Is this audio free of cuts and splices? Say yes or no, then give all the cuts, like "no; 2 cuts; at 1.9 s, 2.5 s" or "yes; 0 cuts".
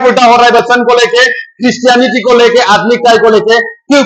yes; 0 cuts